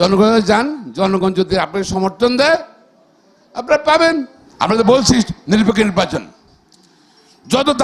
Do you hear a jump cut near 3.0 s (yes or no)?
no